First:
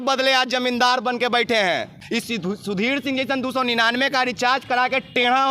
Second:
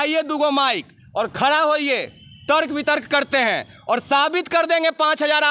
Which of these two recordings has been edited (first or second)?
first